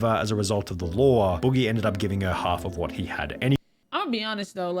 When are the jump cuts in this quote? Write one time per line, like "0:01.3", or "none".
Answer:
0:03.8